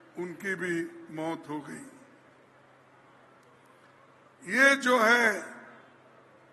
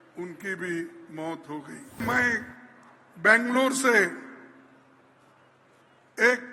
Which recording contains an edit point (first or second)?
second